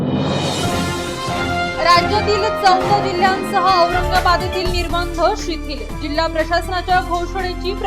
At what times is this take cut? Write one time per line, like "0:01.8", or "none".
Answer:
none